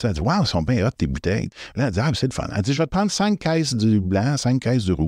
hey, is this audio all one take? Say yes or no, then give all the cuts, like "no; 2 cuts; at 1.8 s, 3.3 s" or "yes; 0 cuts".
no; 1 cut; at 1.5 s